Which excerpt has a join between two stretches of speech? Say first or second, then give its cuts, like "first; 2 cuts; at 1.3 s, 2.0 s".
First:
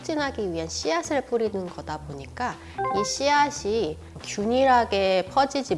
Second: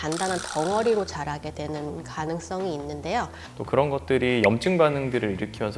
second; 1 cut; at 3.4 s